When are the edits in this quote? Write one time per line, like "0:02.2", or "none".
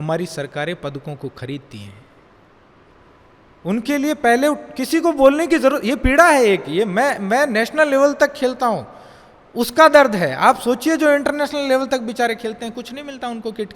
0:02.9